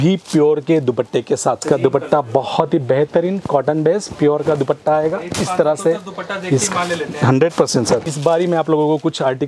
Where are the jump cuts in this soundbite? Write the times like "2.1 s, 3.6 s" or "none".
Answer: 1.6 s, 8.1 s